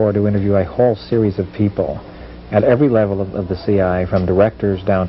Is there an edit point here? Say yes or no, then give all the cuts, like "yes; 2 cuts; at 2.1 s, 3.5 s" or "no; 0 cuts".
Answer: yes; 1 cut; at 3.6 s